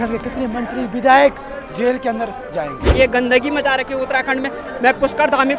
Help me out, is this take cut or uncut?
cut